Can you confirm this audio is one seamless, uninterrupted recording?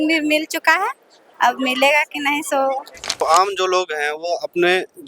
no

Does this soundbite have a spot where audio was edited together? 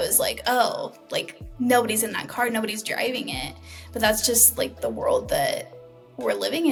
no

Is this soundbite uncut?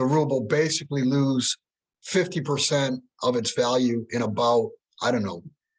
yes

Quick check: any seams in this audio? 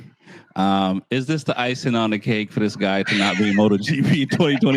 no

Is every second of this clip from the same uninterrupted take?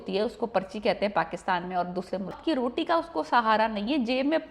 no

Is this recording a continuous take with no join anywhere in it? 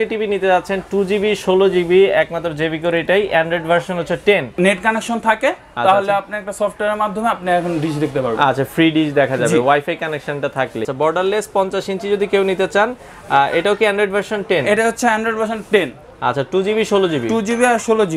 no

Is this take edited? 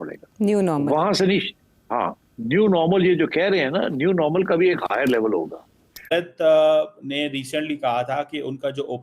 yes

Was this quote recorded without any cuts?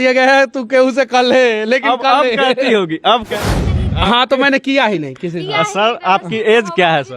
no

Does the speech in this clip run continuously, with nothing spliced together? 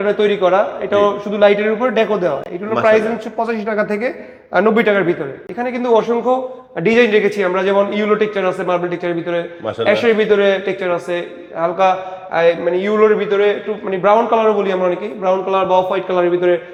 yes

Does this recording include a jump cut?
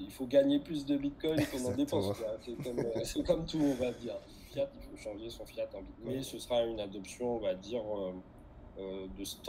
yes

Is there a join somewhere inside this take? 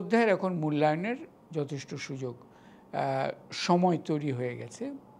no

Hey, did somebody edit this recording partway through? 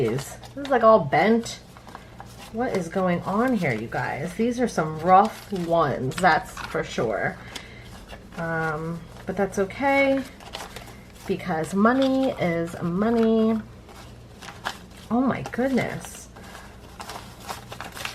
no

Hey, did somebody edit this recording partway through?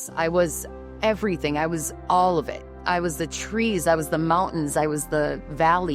no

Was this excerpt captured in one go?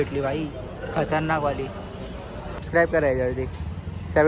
no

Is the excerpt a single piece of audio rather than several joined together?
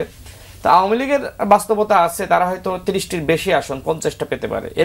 yes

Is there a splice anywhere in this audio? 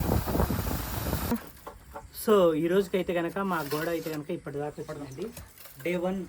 yes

